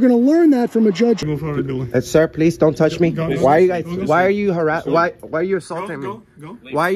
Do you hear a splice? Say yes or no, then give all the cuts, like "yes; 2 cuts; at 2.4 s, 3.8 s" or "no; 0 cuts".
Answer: yes; 1 cut; at 1.2 s